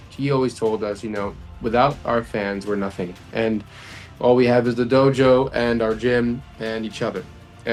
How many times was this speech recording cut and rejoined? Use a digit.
0